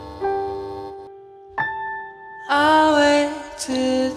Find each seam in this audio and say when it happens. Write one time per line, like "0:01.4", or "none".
none